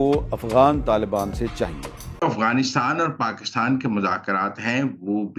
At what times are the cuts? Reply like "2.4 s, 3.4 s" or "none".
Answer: 2.3 s